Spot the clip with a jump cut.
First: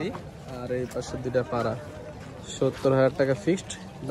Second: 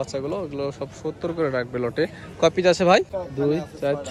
second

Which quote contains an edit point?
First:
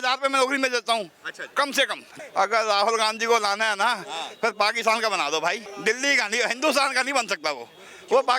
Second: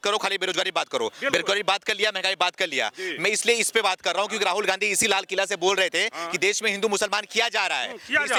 first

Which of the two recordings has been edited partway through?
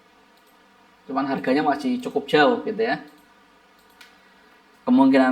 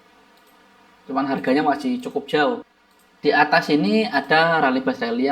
second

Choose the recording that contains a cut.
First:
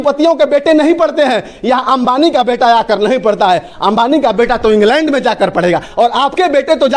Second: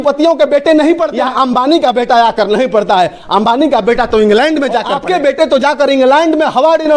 second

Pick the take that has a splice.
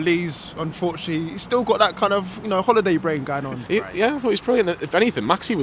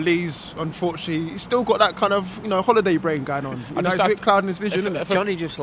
first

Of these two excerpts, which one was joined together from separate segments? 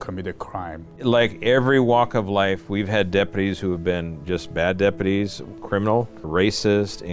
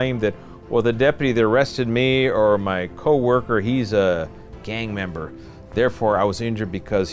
first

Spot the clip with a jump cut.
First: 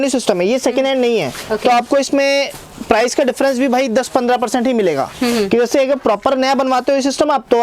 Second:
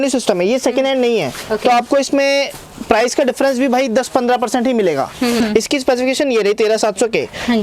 second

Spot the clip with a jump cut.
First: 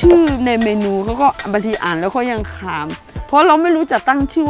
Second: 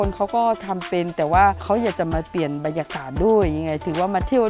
second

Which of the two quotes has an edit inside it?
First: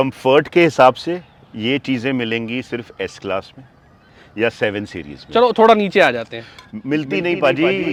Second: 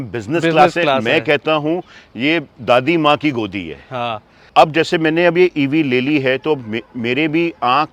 second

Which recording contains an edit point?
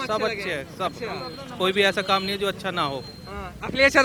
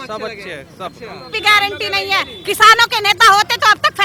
second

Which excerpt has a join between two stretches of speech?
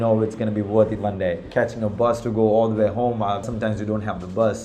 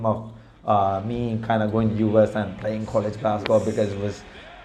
first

